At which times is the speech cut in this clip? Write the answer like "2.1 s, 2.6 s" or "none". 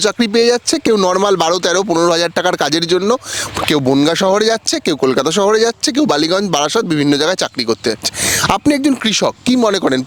none

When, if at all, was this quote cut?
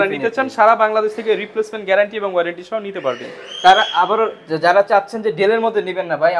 none

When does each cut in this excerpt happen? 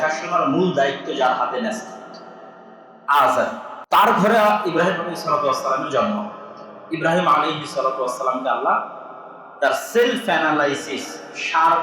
3.7 s

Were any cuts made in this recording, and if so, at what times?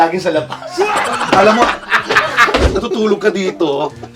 2.7 s

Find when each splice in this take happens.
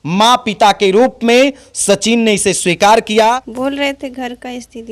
3.5 s

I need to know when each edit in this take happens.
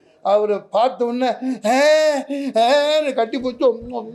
none

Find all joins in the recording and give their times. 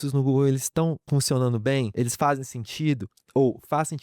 1.0 s, 1.9 s

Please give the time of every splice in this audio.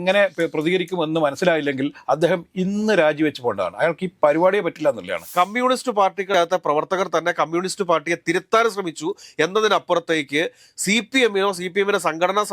5.3 s

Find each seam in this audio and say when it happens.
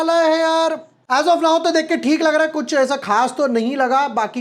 0.9 s

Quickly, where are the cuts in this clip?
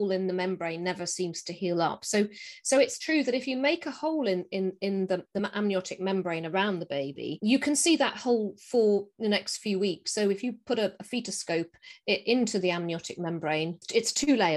none

